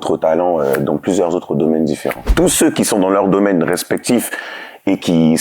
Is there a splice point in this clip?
yes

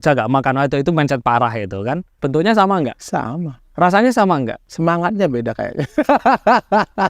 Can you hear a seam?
yes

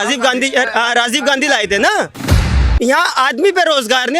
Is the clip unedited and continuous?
no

